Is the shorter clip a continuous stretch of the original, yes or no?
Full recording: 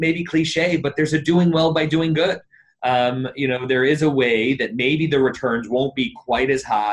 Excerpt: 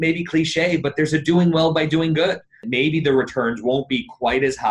no